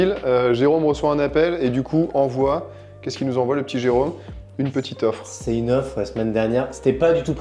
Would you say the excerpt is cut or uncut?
uncut